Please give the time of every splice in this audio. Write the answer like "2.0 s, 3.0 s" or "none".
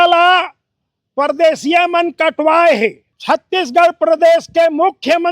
3.1 s